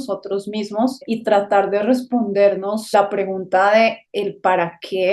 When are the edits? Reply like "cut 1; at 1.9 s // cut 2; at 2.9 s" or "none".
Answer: cut 1; at 1.0 s // cut 2; at 2.9 s